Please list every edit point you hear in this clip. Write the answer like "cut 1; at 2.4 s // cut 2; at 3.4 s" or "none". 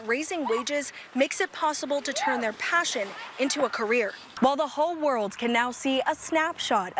cut 1; at 4.2 s